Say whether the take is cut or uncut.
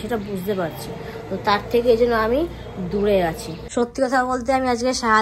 cut